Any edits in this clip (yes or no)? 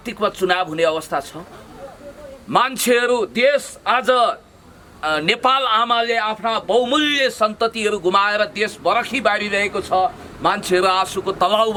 no